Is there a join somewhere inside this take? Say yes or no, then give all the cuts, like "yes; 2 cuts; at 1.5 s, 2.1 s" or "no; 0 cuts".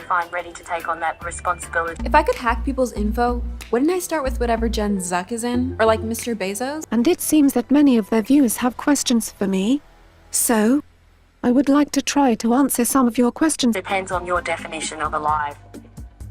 yes; 3 cuts; at 2.0 s, 6.8 s, 13.8 s